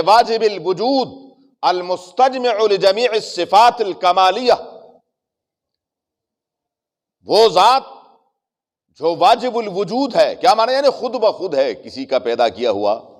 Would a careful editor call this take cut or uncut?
uncut